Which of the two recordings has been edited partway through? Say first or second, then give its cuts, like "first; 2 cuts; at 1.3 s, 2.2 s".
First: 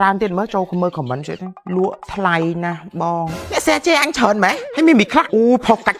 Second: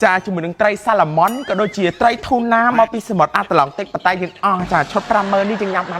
first; 4 cuts; at 1.5 s, 3.3 s, 4.6 s, 5.3 s